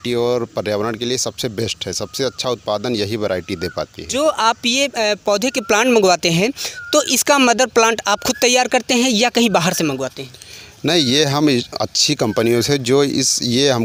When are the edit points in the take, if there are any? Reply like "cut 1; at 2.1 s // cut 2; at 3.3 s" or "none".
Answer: none